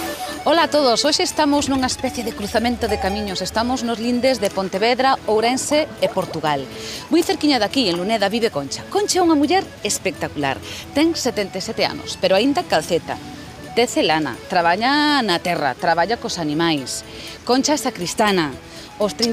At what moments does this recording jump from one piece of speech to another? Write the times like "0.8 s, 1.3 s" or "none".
none